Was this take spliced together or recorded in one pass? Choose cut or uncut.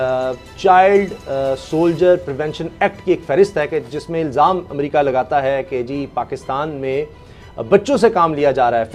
uncut